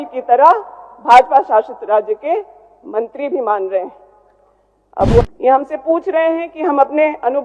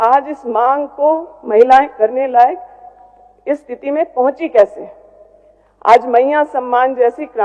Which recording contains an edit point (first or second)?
first